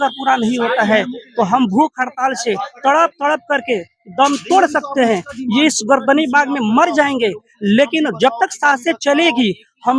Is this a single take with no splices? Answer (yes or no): yes